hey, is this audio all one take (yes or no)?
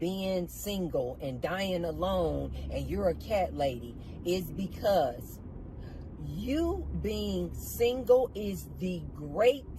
yes